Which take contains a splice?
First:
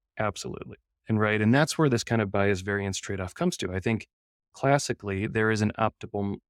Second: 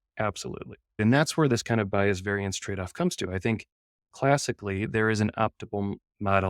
second; 1 cut; at 1.0 s

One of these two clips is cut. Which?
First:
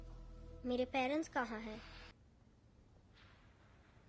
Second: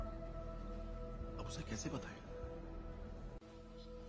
first; 1 cut; at 2.1 s

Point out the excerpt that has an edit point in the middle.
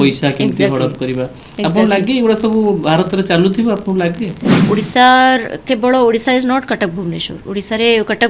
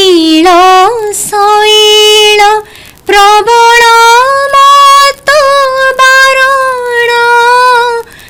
first; 1 cut; at 4.5 s

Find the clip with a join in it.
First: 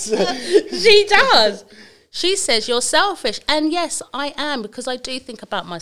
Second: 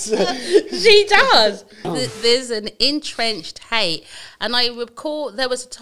second; 1 cut; at 1.8 s

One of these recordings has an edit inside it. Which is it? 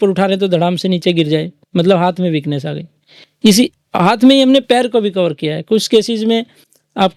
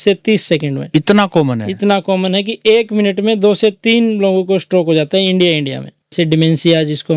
second; 1 cut; at 6.1 s

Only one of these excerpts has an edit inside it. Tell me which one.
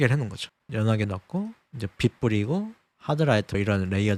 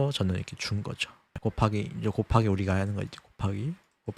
second; 1 cut; at 1.4 s

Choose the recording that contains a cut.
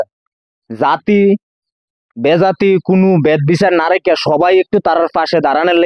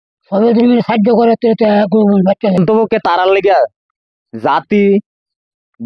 second; 1 cut; at 2.6 s

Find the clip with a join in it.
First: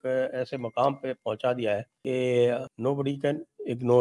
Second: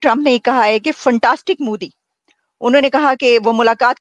first; 2 cuts; at 1.9 s, 2.7 s

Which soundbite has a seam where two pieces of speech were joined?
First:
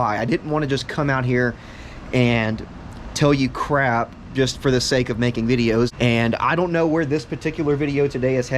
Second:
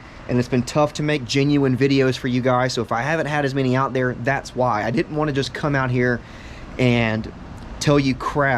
first; 1 cut; at 5.9 s

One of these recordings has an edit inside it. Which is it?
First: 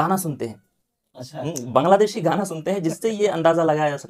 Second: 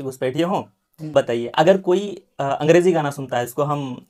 second; 1 cut; at 1.1 s

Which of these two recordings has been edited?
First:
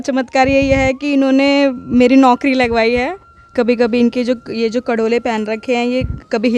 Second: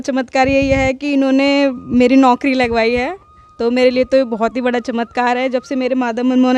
first; 1 cut; at 3.5 s

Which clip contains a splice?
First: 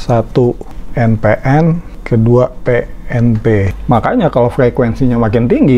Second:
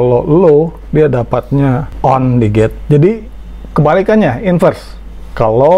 first; 1 cut; at 3.7 s

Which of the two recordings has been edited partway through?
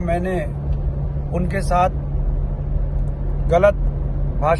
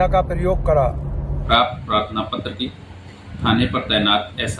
second; 1 cut; at 1.3 s

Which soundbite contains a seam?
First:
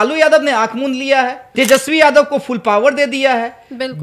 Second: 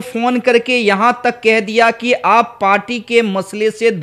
first; 1 cut; at 1.4 s

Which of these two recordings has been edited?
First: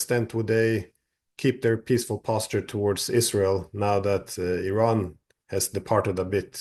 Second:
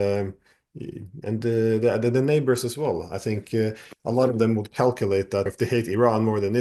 second; 1 cut; at 5.5 s

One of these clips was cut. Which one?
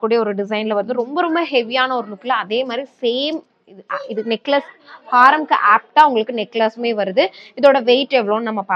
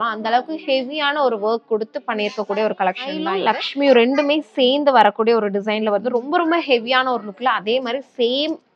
second; 1 cut; at 3.3 s

